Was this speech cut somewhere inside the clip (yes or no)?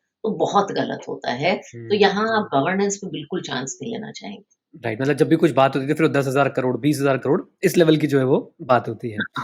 no